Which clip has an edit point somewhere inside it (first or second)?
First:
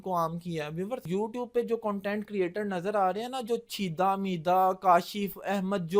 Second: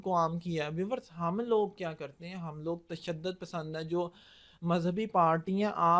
first